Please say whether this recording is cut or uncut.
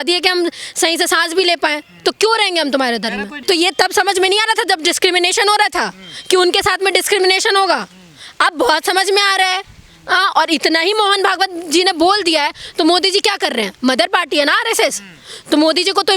cut